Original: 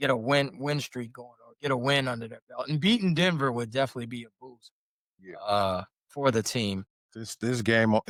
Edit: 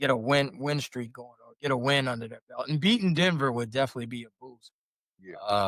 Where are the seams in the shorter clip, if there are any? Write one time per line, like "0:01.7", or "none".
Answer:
none